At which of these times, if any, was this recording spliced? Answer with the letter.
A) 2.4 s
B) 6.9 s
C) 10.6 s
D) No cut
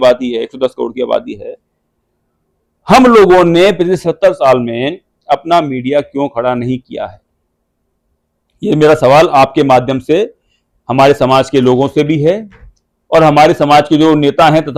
D